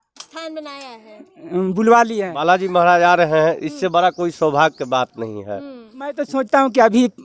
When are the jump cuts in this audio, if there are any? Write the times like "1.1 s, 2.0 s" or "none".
2.1 s, 6.2 s